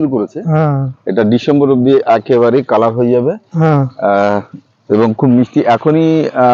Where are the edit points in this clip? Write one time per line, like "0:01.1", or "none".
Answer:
none